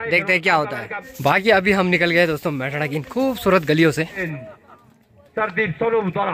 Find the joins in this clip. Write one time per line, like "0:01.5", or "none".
0:01.2
0:04.3